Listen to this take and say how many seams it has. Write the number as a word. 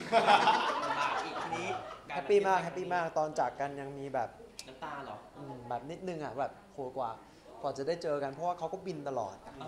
one